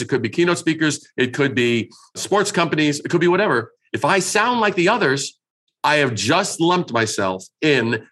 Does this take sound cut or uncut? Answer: uncut